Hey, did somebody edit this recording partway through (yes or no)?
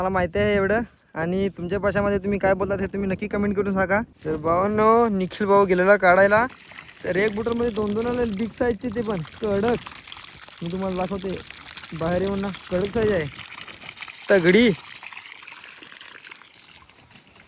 yes